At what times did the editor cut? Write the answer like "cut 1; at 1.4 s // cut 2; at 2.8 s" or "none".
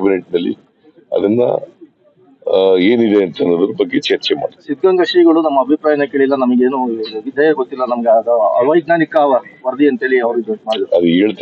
none